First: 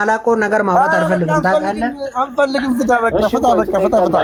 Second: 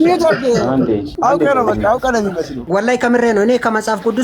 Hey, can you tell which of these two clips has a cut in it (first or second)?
second